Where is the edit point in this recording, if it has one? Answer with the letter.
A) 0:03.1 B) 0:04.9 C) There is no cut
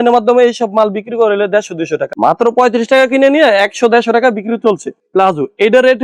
C